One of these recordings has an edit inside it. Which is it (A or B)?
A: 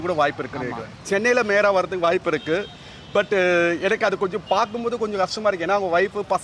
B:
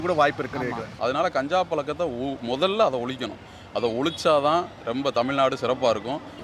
B